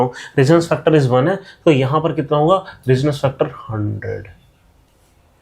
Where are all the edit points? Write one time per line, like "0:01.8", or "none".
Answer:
none